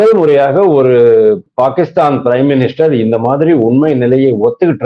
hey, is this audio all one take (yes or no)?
yes